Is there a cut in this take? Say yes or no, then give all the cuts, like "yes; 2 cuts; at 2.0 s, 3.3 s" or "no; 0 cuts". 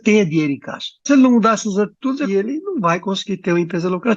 yes; 2 cuts; at 1.1 s, 2.3 s